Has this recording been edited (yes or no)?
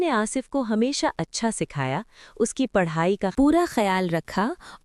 yes